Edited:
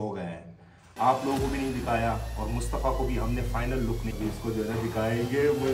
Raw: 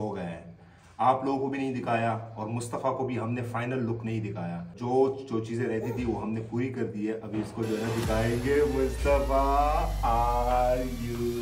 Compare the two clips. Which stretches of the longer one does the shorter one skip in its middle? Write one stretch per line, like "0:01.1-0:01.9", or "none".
0:04.1-0:07.2